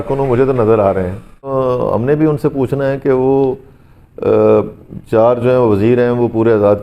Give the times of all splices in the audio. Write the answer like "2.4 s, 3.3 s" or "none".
1.5 s